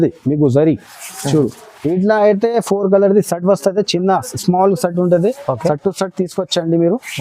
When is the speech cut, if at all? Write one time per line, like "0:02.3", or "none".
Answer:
none